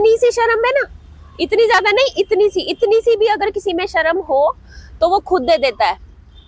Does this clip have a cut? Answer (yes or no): no